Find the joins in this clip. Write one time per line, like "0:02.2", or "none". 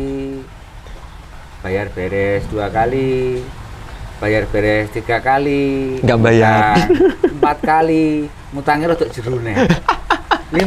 none